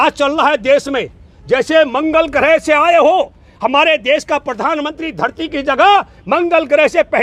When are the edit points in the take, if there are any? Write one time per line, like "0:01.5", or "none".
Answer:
none